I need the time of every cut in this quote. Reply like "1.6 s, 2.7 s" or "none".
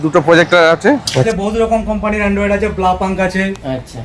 1.3 s